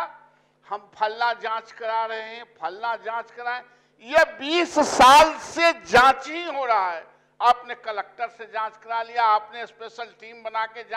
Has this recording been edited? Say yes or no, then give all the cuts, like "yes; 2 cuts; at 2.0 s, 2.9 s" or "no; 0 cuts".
no; 0 cuts